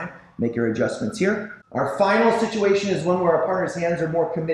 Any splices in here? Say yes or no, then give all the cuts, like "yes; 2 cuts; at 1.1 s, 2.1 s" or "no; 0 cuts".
yes; 1 cut; at 1.6 s